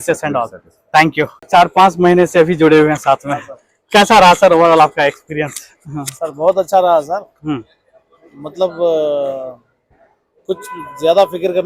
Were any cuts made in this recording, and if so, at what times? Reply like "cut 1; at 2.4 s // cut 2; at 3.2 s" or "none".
cut 1; at 1.5 s